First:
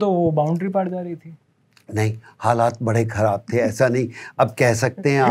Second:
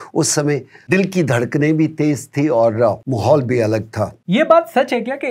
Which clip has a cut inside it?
second; 3 cuts; at 0.9 s, 3.1 s, 4.1 s

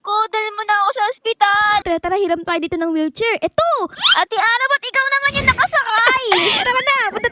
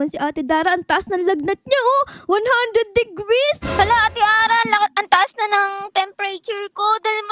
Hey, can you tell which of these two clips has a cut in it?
first; 2 cuts; at 1.8 s, 4.0 s

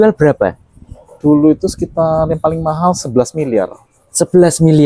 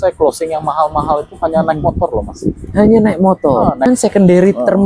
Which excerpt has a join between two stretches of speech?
second; 1 cut; at 3.9 s

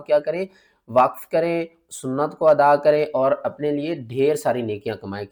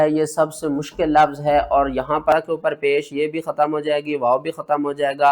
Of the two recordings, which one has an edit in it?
second; 1 cut; at 2.3 s

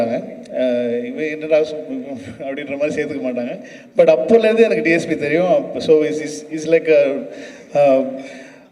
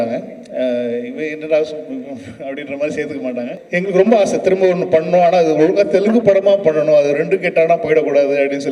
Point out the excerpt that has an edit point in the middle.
second; 1 cut; at 3.6 s

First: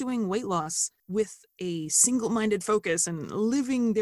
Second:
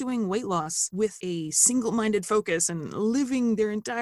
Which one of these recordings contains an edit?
second; 1 cut; at 1.0 s

